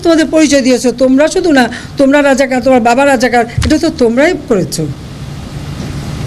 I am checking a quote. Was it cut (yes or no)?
no